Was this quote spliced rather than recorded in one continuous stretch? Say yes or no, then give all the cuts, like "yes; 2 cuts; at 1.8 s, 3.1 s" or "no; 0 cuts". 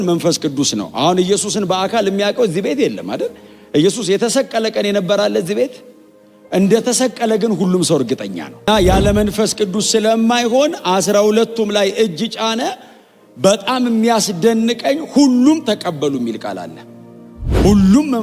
yes; 1 cut; at 8.7 s